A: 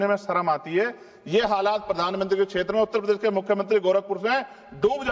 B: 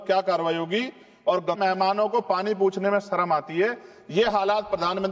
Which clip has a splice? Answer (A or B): B